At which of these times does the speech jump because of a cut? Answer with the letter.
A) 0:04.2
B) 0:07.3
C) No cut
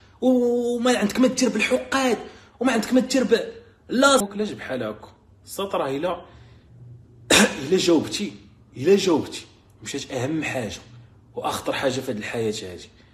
A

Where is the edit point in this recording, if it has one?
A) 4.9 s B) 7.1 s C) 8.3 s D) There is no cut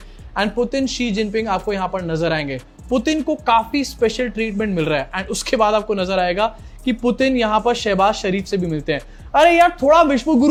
D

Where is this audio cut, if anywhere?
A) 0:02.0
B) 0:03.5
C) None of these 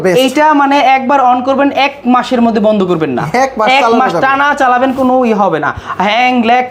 C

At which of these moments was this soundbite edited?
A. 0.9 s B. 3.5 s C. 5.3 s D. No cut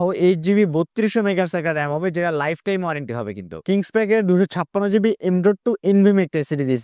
B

